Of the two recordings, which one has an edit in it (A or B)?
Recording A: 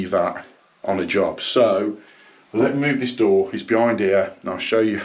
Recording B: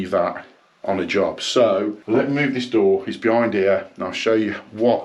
B